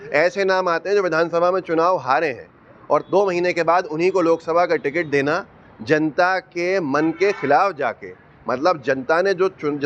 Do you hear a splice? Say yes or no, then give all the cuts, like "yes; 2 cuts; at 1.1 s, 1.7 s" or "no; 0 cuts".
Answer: no; 0 cuts